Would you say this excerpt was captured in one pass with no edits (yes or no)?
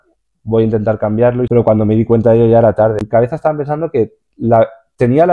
no